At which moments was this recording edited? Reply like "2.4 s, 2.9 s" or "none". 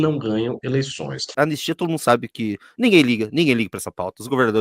1.3 s